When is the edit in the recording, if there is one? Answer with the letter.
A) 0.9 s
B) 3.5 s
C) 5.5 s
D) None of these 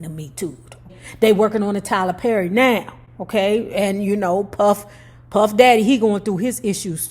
A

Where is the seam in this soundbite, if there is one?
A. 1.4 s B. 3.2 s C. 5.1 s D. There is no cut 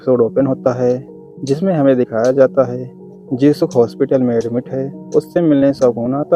D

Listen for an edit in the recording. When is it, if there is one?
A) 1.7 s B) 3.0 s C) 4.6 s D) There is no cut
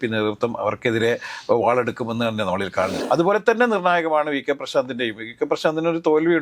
B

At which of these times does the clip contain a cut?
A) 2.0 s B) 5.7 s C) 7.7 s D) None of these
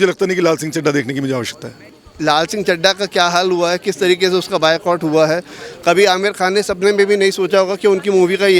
A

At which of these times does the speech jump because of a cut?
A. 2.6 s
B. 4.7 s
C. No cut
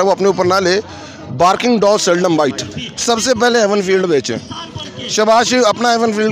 A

